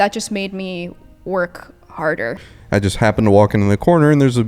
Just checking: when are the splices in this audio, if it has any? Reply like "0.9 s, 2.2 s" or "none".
2.4 s